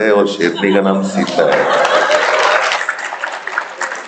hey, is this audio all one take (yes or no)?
yes